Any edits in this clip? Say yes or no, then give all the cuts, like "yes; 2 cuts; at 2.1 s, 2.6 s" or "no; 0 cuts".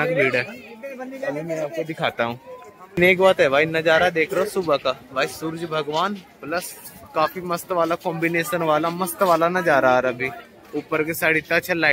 yes; 1 cut; at 3.0 s